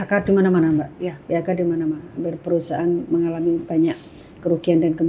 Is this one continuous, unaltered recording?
yes; 0 cuts

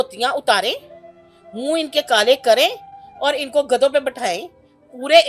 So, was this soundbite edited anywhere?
no; 0 cuts

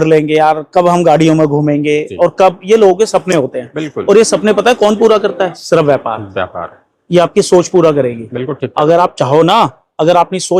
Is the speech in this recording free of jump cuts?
yes; 0 cuts

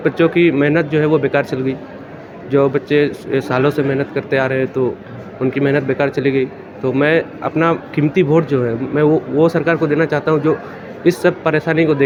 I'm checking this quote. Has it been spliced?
no; 0 cuts

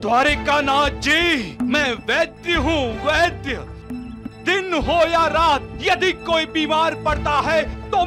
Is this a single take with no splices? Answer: yes; 0 cuts

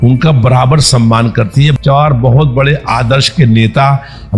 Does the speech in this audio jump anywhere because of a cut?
yes; 1 cut; at 1.8 s

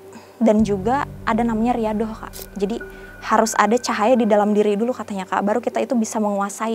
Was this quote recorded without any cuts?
no; 1 cut; at 2.3 s

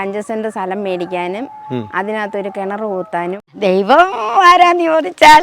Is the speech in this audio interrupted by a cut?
yes; 1 cut; at 3.5 s

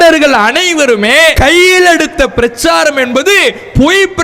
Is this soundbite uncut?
no; 1 cut; at 1.4 s

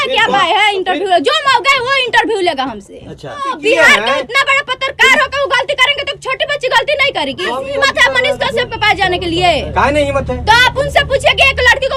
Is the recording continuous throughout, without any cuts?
no; 2 cuts; at 3.6 s, 7.5 s

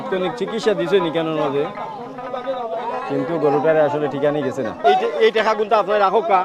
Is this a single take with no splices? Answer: no; 1 cut; at 4.8 s

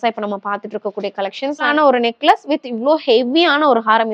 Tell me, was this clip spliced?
yes; 1 cut; at 1.7 s

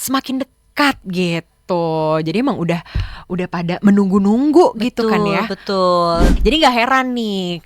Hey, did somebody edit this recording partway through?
yes; 1 cut; at 6.3 s

